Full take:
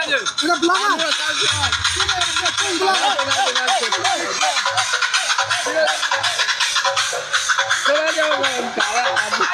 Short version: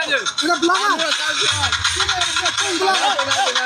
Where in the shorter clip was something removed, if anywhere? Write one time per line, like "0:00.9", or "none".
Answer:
none